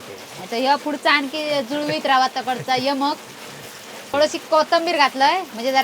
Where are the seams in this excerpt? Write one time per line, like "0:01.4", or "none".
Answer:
0:04.1